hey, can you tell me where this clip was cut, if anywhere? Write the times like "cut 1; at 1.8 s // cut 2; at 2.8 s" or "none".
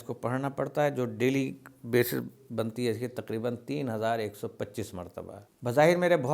cut 1; at 5.4 s